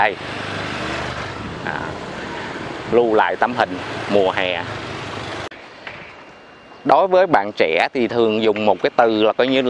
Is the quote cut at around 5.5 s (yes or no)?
yes